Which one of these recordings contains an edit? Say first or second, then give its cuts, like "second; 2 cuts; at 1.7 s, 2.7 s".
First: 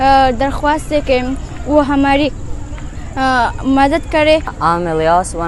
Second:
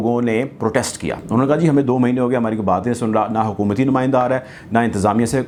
first; 1 cut; at 4.4 s